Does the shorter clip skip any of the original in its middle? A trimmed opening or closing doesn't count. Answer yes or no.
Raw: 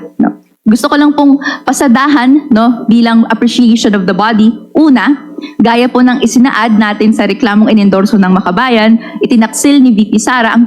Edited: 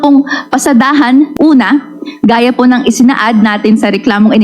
yes